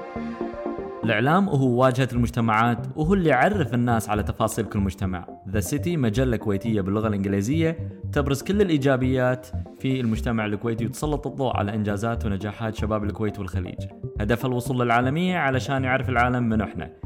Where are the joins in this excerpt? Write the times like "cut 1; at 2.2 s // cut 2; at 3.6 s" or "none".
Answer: cut 1; at 1.0 s